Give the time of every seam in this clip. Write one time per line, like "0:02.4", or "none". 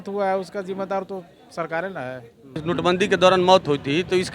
0:02.6